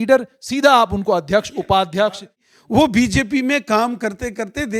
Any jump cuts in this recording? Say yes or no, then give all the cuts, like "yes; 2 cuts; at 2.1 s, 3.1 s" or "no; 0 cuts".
yes; 1 cut; at 2.5 s